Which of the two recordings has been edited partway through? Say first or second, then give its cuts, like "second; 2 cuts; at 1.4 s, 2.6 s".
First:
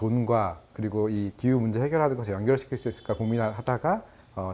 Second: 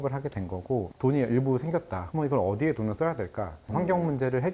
second; 3 cuts; at 0.9 s, 2.0 s, 3.6 s